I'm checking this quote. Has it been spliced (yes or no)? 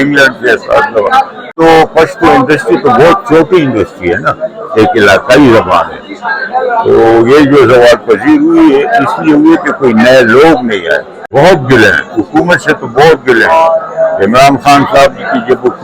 yes